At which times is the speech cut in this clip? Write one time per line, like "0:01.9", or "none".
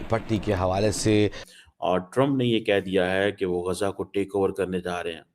0:01.5